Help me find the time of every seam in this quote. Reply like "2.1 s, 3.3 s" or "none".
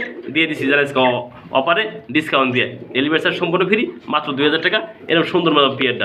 none